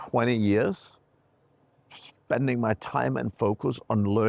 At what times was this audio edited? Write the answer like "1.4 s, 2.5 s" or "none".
none